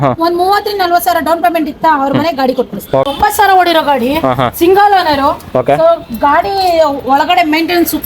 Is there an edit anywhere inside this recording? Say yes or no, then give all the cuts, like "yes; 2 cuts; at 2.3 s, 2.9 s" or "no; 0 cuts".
yes; 1 cut; at 3.1 s